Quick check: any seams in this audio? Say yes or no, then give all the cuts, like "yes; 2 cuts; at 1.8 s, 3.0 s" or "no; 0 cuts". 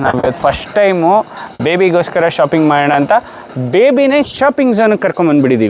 no; 0 cuts